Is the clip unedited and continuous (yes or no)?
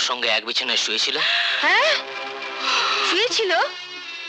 yes